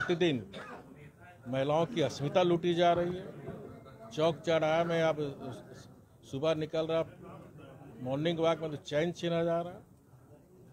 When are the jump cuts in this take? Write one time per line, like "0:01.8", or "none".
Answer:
none